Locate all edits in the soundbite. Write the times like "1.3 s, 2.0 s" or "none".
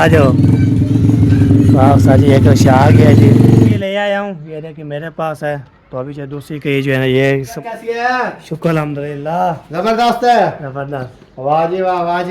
3.8 s, 7.5 s

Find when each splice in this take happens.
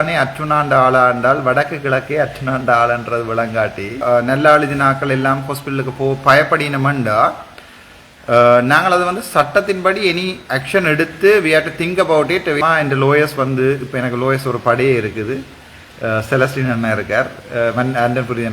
4.0 s, 12.6 s

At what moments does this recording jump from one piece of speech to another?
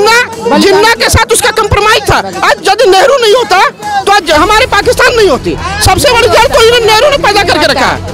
none

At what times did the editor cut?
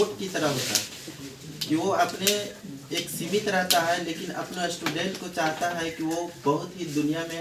none

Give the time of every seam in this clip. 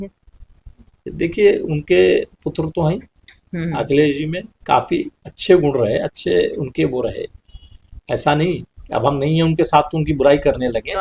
none

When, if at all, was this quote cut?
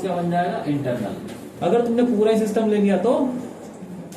1.5 s

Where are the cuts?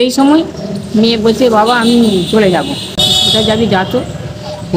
3.1 s

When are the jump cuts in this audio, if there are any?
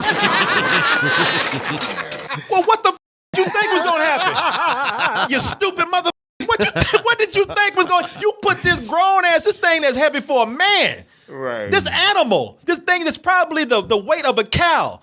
none

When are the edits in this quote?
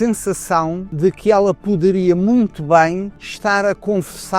0.9 s, 3.2 s

